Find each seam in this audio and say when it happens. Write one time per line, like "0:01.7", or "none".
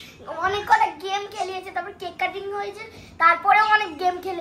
none